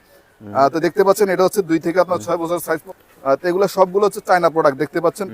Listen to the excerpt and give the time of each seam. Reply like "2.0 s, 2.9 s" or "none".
2.9 s